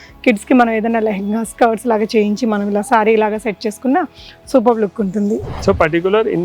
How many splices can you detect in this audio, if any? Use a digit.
1